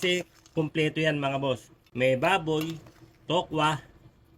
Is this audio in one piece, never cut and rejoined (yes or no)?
yes